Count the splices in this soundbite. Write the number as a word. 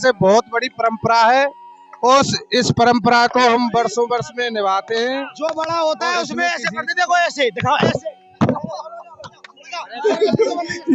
one